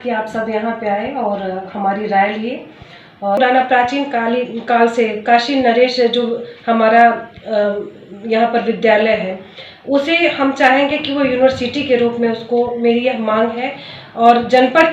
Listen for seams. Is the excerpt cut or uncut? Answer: cut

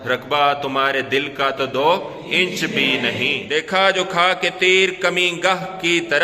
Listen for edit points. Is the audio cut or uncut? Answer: cut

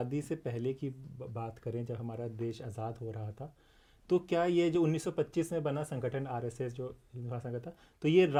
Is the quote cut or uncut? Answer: uncut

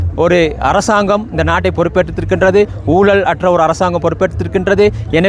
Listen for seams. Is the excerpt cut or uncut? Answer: uncut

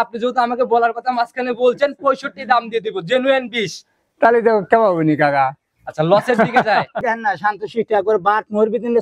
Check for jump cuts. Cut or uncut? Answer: cut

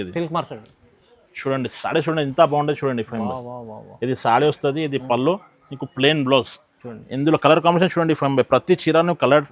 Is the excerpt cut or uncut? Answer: uncut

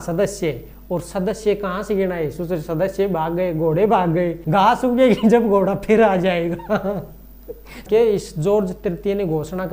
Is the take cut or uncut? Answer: cut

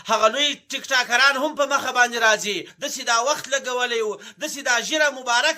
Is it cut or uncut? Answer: cut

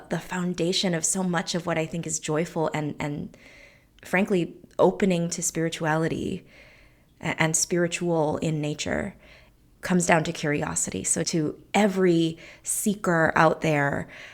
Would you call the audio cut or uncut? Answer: cut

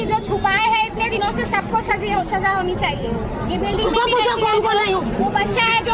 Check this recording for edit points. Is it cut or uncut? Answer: uncut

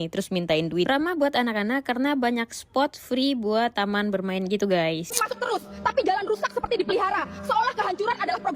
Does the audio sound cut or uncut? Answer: cut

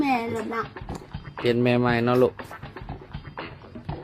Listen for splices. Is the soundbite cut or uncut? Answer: cut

